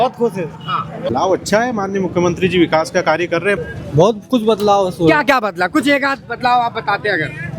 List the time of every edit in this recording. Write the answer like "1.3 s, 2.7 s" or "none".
1.0 s, 3.6 s